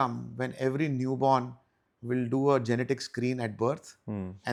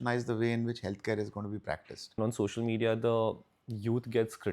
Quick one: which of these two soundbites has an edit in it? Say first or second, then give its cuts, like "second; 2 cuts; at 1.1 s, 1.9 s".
second; 1 cut; at 2.2 s